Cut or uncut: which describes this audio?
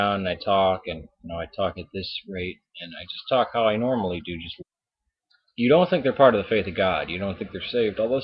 uncut